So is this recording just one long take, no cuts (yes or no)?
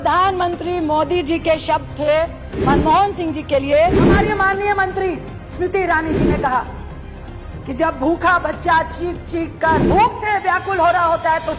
no